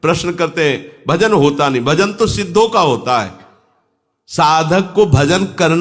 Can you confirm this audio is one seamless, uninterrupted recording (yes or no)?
yes